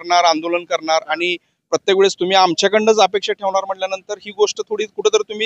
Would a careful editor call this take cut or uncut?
uncut